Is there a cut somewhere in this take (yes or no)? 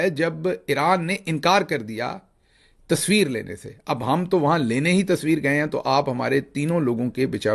no